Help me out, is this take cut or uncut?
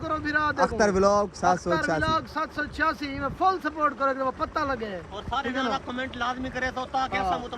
uncut